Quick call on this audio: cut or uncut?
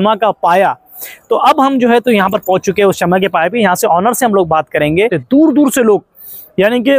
cut